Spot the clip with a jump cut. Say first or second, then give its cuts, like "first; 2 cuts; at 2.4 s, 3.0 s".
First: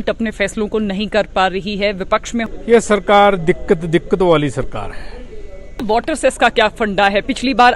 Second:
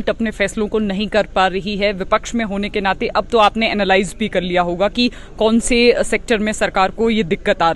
first; 2 cuts; at 2.5 s, 5.8 s